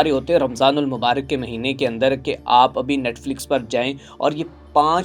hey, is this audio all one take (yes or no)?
yes